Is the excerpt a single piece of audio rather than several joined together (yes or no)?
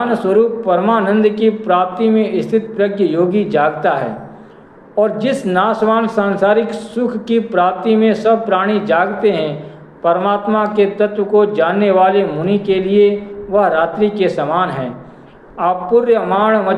no